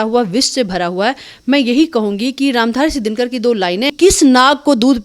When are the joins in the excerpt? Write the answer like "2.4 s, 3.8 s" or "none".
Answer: 3.9 s